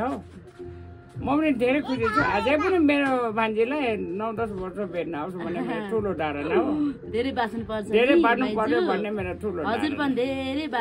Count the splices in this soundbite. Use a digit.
0